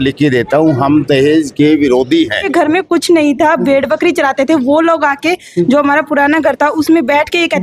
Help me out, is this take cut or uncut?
cut